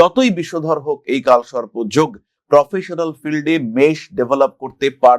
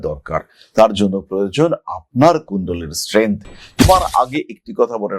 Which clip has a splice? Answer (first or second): second